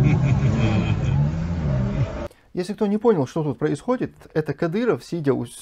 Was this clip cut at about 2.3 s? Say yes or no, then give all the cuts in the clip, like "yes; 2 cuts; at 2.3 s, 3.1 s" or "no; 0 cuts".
yes; 1 cut; at 2.3 s